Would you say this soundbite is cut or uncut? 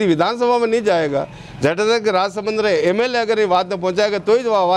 uncut